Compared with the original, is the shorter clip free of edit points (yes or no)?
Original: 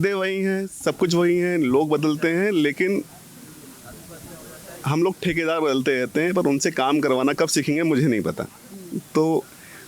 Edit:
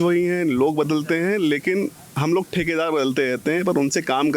no